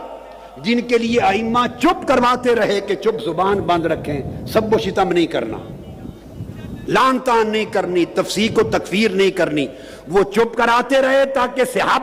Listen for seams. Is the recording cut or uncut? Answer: uncut